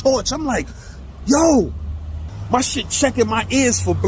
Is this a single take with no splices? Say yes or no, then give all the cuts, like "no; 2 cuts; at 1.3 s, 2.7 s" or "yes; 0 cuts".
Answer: no; 1 cut; at 2.3 s